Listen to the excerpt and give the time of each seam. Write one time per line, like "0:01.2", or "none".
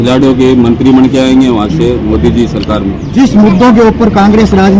0:03.0